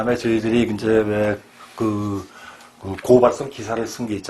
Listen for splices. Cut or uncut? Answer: uncut